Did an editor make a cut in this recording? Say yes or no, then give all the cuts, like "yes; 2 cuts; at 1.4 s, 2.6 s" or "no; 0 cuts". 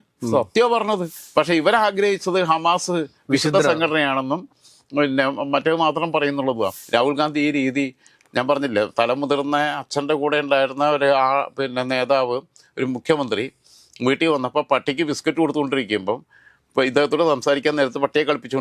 yes; 2 cuts; at 1.1 s, 6.7 s